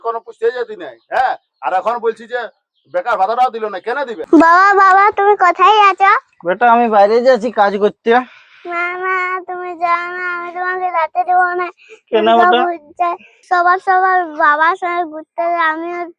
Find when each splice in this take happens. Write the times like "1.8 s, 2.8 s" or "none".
4.2 s, 13.3 s